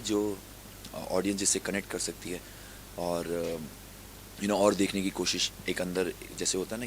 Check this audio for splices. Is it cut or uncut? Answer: uncut